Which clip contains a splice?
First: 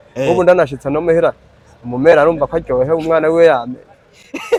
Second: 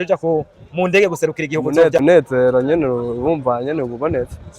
second; 1 cut; at 2.0 s

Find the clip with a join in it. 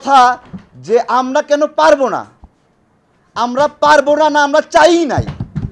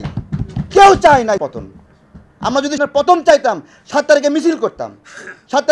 second; 2 cuts; at 1.4 s, 2.8 s

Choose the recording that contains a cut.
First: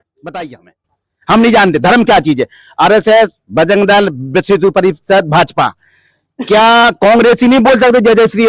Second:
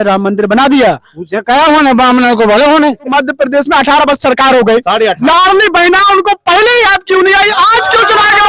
second; 1 cut; at 3.1 s

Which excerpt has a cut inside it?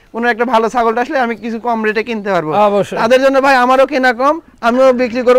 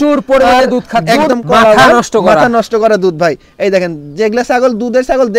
second; 1 cut; at 1.2 s

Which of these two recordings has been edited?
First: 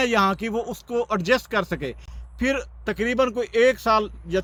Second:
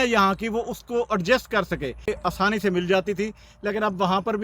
second; 1 cut; at 2.1 s

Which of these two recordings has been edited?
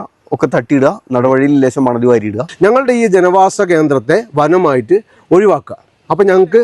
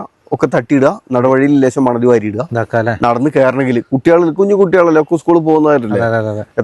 first; 1 cut; at 2.4 s

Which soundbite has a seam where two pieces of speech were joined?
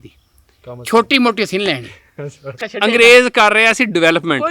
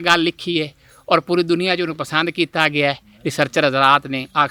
first; 1 cut; at 2.6 s

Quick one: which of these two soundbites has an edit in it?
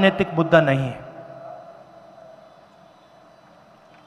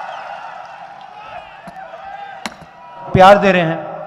second; 1 cut; at 2.8 s

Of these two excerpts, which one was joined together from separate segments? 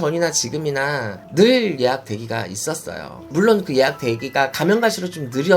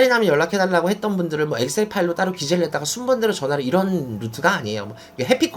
first; 1 cut; at 3.2 s

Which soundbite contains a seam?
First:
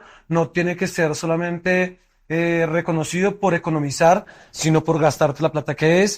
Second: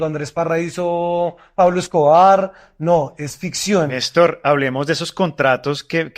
second; 1 cut; at 4.0 s

